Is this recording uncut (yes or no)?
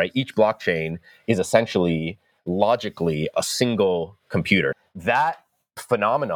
no